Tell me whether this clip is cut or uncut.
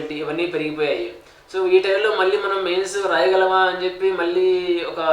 uncut